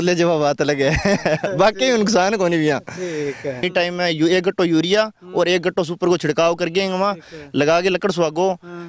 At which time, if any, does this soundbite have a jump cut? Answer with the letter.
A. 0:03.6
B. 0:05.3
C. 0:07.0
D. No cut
A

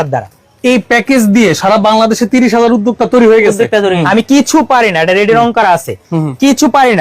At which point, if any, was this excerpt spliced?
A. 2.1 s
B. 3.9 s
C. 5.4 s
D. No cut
B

